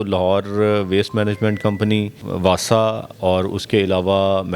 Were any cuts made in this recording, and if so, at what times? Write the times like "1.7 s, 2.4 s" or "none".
2.2 s